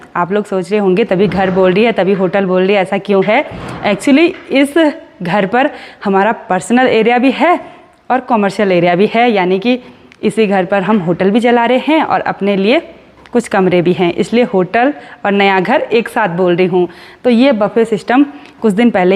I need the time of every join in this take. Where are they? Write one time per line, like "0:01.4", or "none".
none